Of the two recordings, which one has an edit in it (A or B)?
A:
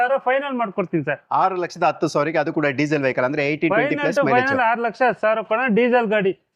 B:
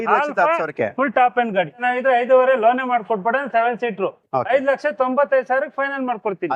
B